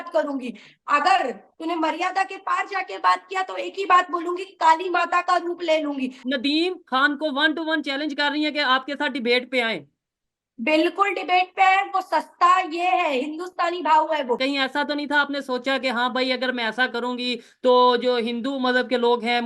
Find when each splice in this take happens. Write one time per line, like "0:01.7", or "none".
0:06.2
0:14.4